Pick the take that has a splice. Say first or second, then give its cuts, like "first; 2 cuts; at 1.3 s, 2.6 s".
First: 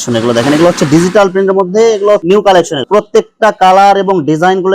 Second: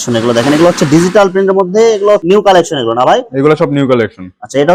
first; 1 cut; at 2.8 s